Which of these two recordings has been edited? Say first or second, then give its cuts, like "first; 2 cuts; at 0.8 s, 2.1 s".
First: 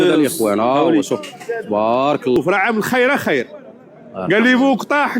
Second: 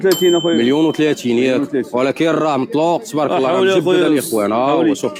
first; 1 cut; at 2.4 s